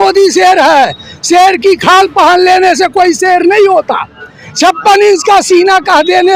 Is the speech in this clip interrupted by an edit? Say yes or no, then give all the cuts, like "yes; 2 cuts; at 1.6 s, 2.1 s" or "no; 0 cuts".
no; 0 cuts